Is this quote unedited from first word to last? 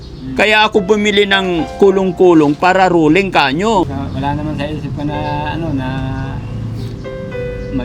no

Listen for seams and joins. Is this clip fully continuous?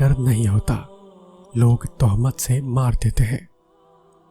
no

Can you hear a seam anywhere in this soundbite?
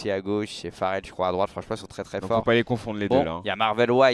yes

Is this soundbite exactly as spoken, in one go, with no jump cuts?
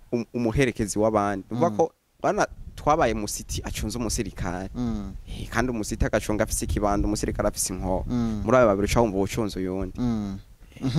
yes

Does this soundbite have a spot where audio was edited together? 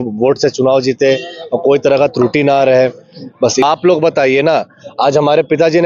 yes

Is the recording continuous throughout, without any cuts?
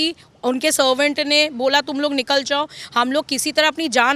yes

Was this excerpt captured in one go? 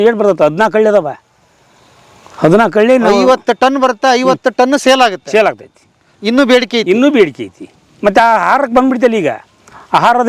yes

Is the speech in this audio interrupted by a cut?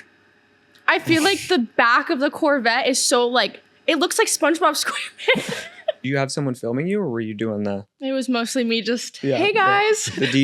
yes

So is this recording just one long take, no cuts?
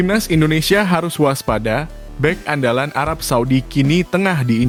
yes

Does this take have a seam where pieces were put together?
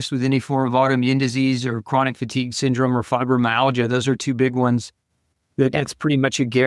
no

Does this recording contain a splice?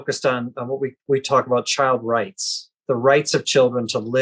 no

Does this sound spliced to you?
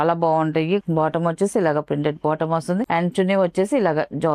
yes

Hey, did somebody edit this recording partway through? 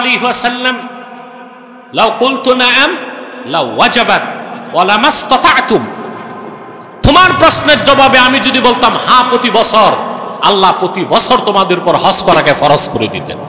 no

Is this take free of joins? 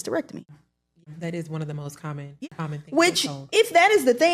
no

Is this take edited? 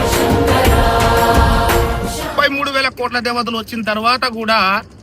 yes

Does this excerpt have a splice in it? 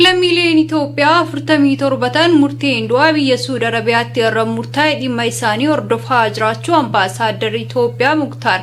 no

